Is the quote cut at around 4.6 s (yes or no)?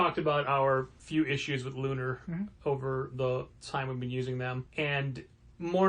yes